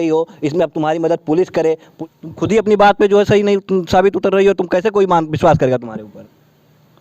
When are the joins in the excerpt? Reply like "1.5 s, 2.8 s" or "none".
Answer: 1.9 s